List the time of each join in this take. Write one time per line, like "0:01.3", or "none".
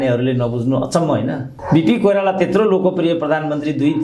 0:01.5